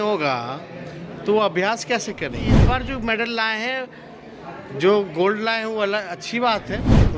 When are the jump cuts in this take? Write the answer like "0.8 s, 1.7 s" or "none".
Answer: 2.6 s